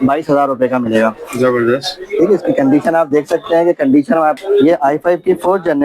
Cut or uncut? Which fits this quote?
cut